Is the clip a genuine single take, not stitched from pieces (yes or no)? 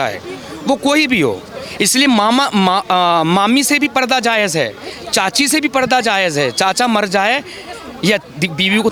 yes